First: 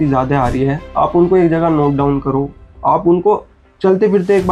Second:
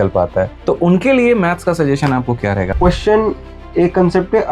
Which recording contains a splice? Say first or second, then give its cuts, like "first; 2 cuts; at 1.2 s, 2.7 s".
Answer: second; 1 cut; at 2.7 s